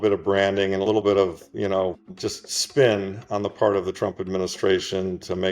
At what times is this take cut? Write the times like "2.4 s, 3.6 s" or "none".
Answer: 2.1 s